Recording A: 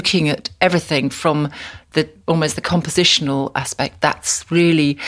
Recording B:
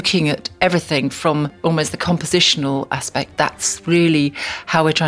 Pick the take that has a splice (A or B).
B